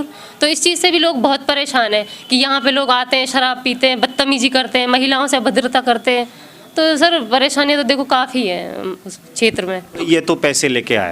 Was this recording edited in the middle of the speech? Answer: yes; 1 cut; at 10.0 s

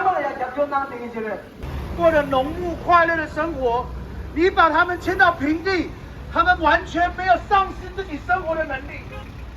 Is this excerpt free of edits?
no; 1 cut; at 1.6 s

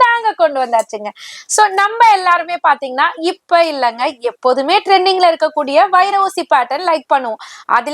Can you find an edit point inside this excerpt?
no; 0 cuts

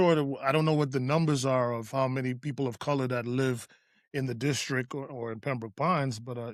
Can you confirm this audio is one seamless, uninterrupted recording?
yes; 0 cuts

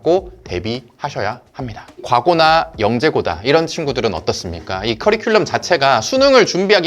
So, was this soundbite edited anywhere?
yes; 1 cut; at 2.0 s

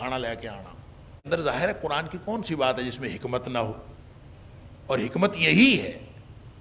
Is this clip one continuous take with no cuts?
no; 1 cut; at 1.3 s

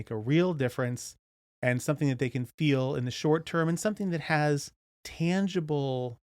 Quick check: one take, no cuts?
no; 1 cut; at 5.0 s

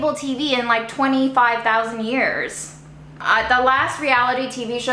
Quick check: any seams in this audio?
yes; 1 cut; at 3.2 s

